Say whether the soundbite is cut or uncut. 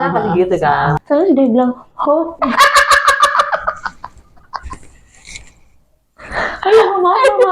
cut